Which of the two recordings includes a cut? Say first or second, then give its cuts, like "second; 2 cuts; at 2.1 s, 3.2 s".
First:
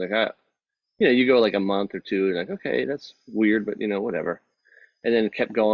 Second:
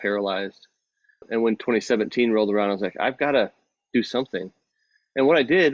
second; 1 cut; at 1.2 s